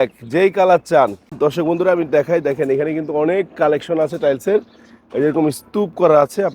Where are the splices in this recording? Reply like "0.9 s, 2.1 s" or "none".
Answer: 1.3 s